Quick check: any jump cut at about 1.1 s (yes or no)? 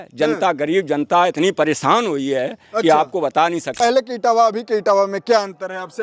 no